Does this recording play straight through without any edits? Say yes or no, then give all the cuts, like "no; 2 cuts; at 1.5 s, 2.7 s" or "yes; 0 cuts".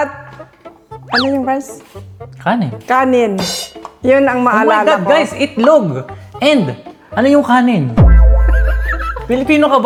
yes; 0 cuts